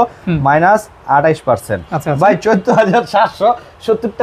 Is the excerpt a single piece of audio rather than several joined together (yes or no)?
yes